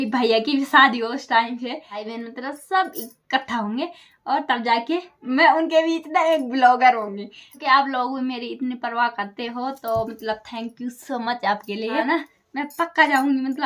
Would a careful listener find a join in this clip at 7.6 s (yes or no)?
yes